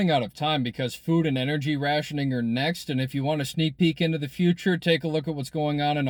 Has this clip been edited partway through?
no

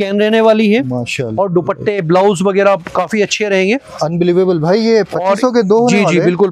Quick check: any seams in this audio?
no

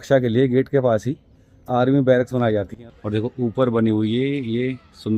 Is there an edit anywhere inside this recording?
yes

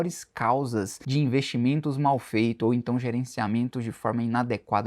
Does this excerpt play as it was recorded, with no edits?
no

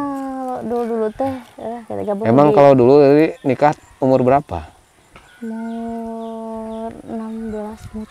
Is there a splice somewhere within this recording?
no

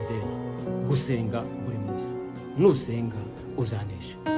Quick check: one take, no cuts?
yes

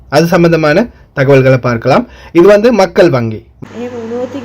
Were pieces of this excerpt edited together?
yes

